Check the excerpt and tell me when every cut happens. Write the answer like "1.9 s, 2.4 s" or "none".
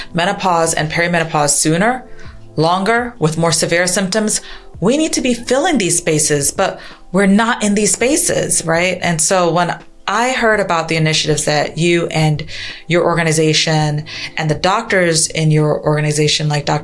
none